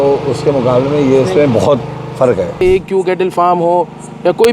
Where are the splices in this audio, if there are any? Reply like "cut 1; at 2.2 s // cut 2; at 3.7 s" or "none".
cut 1; at 2.6 s